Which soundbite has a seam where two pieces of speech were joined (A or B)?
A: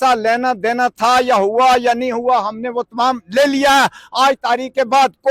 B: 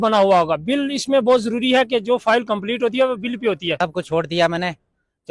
B